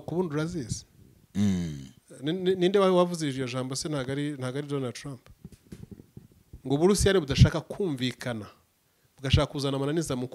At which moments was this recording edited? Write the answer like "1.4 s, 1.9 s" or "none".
none